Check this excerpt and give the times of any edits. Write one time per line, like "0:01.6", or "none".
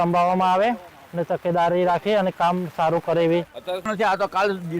0:03.6